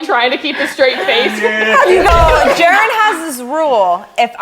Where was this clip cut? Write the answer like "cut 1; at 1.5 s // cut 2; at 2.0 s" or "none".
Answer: cut 1; at 2.1 s

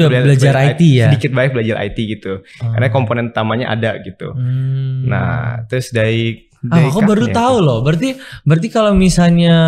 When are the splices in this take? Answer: none

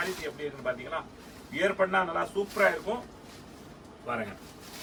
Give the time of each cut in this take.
none

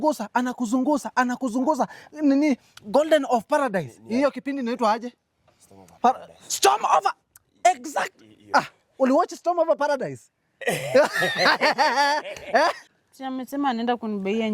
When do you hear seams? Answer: cut 1; at 12.9 s

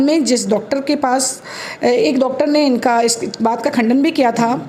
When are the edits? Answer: none

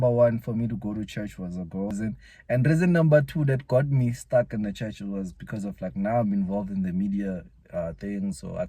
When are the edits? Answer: cut 1; at 2.0 s

